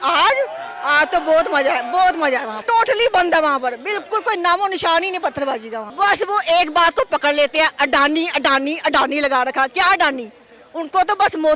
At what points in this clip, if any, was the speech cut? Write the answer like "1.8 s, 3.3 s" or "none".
2.6 s, 5.8 s

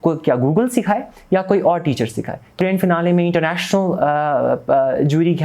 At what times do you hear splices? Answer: 2.6 s

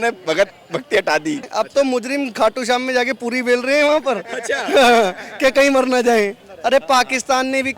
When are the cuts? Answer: 1.5 s, 6.5 s

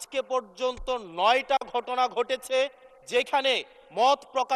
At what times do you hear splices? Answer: none

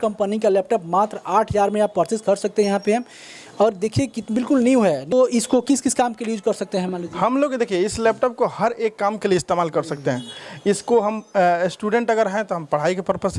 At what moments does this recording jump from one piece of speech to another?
none

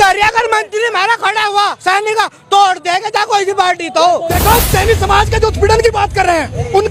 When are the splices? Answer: 4.3 s

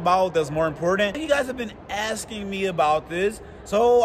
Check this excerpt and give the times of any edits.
1.2 s

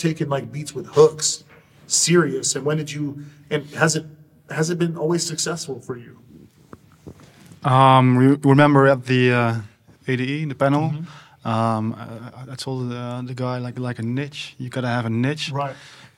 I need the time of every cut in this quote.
none

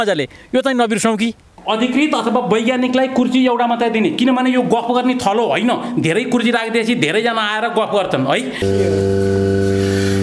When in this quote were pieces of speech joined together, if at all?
1.5 s, 8.5 s

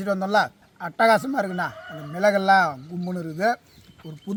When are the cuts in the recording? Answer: none

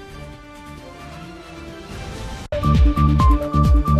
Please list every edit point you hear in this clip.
2.0 s

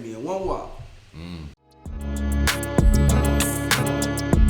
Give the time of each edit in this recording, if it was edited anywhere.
1.7 s

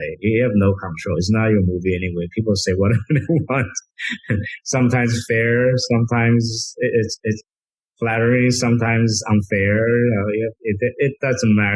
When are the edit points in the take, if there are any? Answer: none

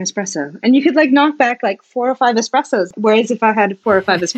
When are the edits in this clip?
2.9 s

